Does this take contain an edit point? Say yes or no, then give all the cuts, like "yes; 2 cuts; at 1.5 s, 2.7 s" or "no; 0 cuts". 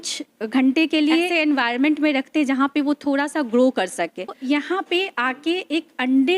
yes; 2 cuts; at 1.3 s, 4.4 s